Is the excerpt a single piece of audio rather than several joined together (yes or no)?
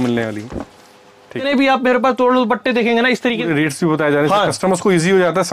no